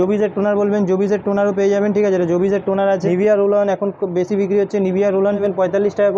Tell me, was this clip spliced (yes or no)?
yes